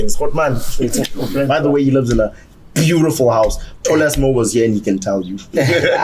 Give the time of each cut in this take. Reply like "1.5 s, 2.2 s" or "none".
1.5 s